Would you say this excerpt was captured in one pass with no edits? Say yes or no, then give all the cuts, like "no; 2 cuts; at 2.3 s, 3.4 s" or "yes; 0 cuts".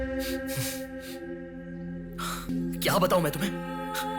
no; 1 cut; at 2.5 s